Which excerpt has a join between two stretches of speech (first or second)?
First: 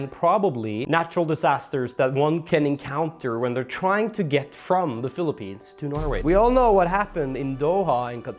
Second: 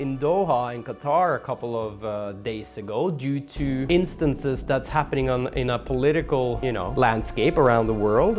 first